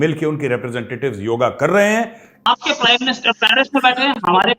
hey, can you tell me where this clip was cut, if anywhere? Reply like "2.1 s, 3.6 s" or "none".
2.3 s